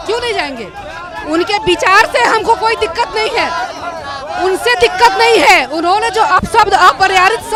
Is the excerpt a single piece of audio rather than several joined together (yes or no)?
yes